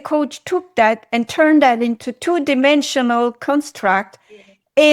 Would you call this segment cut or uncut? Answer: uncut